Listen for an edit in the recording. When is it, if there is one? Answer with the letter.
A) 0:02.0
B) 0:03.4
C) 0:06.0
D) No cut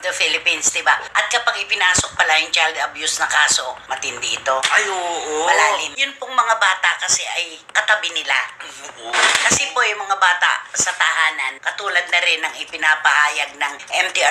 C